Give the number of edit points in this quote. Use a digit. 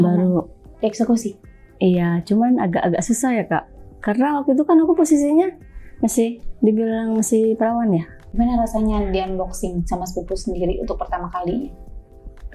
1